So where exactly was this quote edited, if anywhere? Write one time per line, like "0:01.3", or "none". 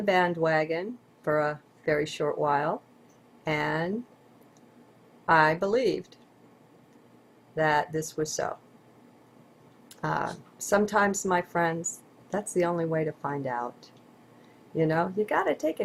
none